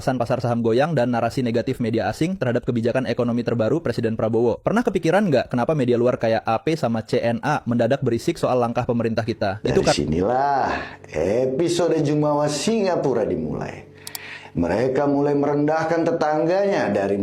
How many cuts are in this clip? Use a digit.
1